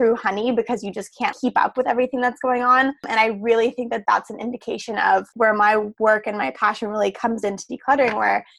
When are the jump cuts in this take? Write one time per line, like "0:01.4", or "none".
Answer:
0:01.3
0:03.0
0:05.3